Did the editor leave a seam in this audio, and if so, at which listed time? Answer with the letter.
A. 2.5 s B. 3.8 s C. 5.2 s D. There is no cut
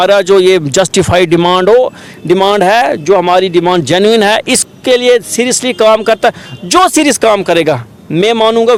D